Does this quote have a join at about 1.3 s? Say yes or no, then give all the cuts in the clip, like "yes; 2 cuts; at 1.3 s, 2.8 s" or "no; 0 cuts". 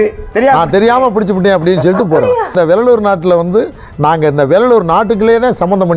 no; 1 cut; at 2.5 s